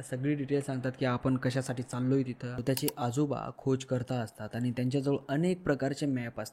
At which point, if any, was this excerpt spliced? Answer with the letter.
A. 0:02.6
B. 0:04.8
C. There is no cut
A